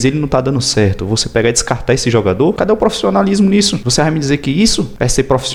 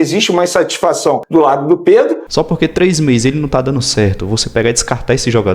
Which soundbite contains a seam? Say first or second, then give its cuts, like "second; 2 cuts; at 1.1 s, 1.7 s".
second; 1 cut; at 2.2 s